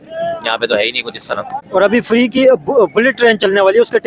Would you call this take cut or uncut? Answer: uncut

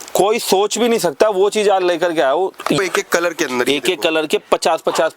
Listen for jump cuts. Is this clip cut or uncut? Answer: cut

